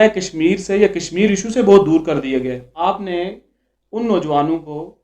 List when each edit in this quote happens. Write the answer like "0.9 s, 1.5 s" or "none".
2.6 s